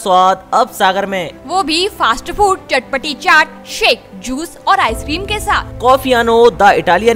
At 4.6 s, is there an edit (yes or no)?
no